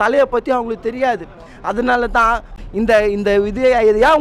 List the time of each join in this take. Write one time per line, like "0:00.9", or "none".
0:02.6